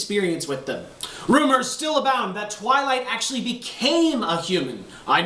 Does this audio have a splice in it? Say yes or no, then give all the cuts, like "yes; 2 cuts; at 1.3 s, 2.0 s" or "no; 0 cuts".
no; 0 cuts